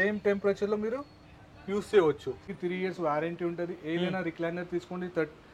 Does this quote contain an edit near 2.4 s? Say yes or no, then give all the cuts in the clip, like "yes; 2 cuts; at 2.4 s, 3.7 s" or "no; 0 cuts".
yes; 1 cut; at 2.4 s